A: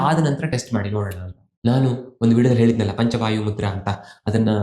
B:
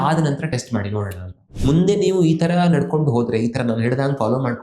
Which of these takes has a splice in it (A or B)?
B